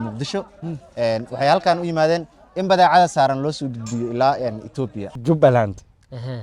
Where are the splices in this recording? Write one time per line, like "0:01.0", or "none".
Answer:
0:05.1